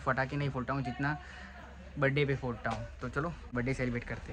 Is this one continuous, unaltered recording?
no; 1 cut; at 3.4 s

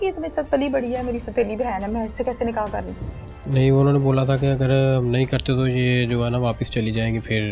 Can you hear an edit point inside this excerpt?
no; 0 cuts

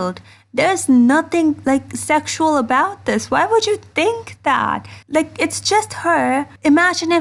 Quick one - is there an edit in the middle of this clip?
no; 0 cuts

